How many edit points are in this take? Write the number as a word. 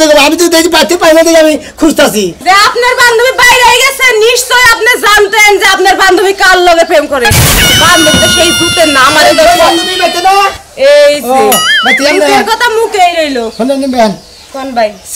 one